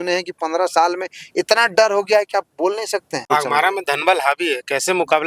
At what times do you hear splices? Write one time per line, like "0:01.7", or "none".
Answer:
0:03.2